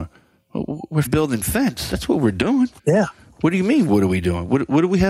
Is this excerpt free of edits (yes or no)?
no